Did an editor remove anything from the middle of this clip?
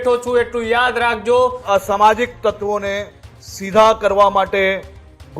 yes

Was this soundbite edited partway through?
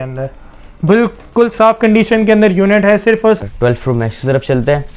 yes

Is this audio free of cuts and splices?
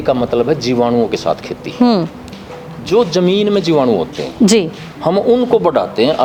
yes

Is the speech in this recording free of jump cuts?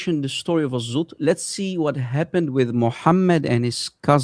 yes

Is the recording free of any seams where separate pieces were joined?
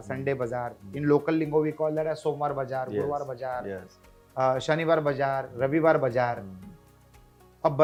yes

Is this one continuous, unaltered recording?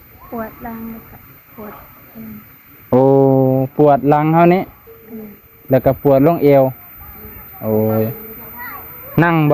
yes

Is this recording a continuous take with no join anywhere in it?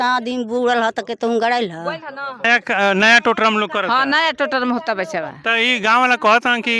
no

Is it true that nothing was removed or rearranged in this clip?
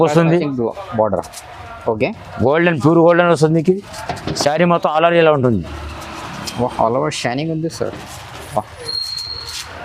yes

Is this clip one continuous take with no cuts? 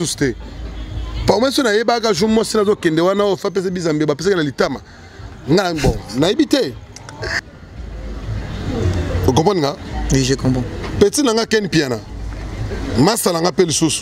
no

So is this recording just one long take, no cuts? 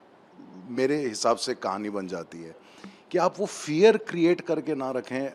yes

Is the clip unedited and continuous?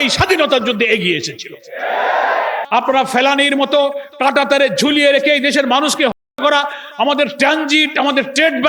no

